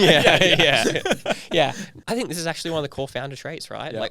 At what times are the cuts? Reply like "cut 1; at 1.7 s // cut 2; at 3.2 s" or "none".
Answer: cut 1; at 1.9 s